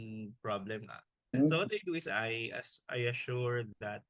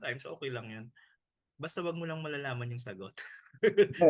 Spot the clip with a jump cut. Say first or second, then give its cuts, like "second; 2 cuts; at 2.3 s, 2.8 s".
first; 2 cuts; at 1.3 s, 2.1 s